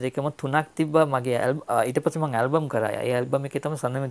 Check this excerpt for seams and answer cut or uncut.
uncut